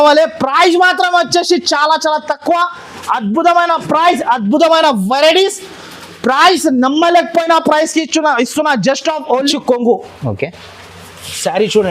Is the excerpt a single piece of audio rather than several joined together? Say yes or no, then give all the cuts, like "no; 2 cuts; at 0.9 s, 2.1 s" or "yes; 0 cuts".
no; 1 cut; at 9.5 s